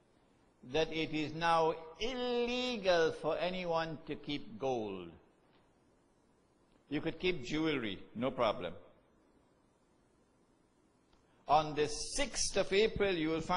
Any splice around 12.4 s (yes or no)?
yes